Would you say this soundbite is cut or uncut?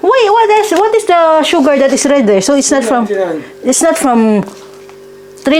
uncut